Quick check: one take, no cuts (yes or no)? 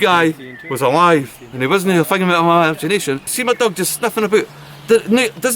no